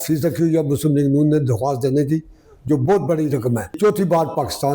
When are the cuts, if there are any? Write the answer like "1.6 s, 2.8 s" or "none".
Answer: 3.7 s